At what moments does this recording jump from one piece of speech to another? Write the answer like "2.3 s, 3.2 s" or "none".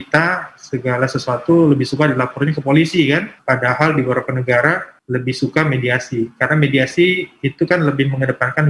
3.3 s, 4.9 s